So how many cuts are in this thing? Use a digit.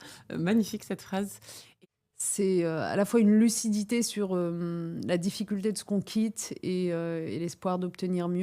1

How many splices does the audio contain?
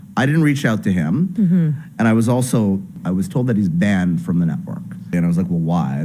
2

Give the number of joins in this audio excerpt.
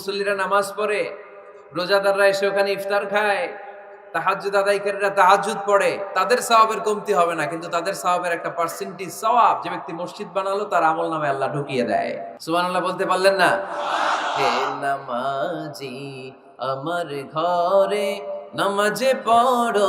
1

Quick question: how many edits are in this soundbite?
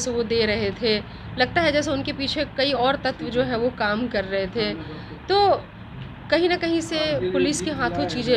0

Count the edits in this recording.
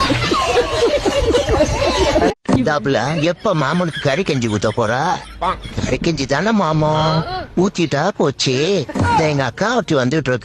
1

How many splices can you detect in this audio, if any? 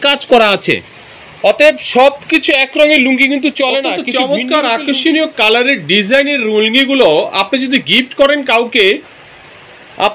1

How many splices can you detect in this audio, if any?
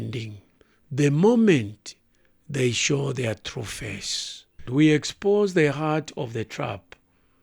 1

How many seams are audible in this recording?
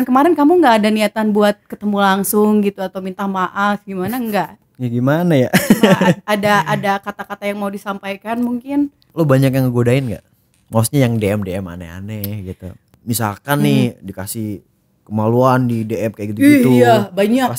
3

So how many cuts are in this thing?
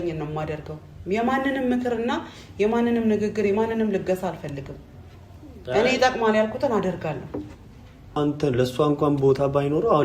1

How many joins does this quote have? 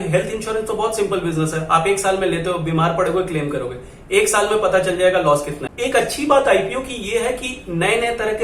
1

